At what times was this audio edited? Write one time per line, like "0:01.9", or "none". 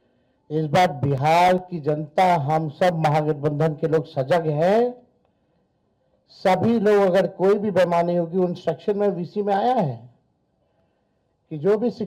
none